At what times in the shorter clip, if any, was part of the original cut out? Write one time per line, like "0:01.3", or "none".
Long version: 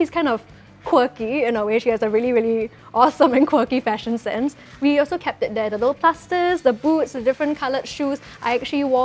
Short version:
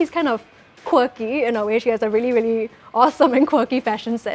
none